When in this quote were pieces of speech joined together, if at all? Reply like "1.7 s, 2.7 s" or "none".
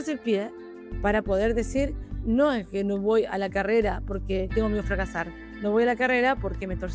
4.5 s